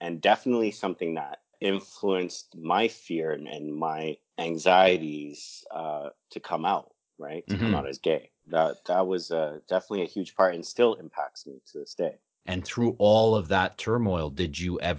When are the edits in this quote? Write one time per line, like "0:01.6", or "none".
0:01.5
0:04.3
0:08.4
0:12.3